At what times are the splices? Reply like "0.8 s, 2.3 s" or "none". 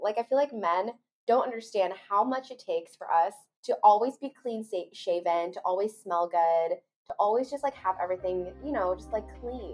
none